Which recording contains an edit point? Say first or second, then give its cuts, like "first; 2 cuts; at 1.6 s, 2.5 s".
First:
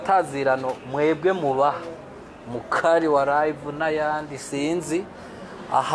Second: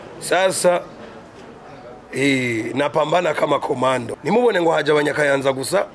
second; 1 cut; at 4.1 s